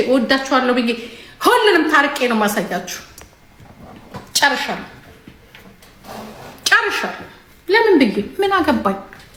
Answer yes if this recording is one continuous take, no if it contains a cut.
yes